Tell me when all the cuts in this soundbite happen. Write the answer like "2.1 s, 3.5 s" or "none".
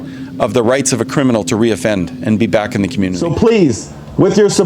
3.2 s